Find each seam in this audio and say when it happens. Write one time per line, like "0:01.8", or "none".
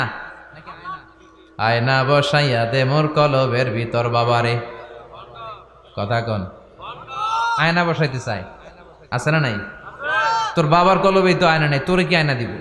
none

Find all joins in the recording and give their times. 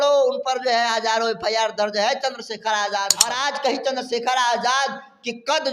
0:03.3

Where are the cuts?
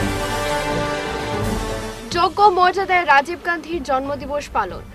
0:01.4

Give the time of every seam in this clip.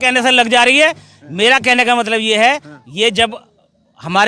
none

